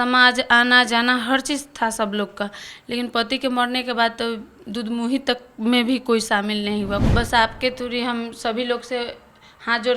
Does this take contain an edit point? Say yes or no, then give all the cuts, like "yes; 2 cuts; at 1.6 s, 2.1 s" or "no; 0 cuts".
yes; 1 cut; at 7.0 s